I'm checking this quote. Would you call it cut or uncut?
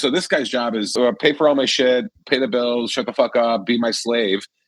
cut